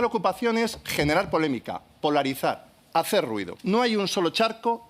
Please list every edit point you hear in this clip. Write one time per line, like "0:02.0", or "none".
0:03.5